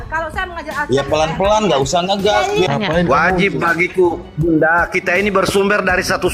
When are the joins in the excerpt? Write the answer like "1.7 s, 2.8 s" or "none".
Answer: 2.7 s